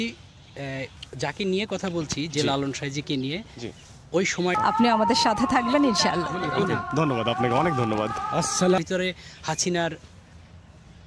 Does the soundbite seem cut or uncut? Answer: cut